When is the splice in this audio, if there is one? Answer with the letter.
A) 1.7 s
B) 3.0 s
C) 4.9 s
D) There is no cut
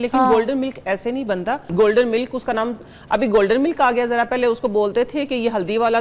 A